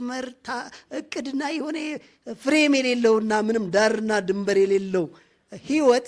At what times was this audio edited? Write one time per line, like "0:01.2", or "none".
none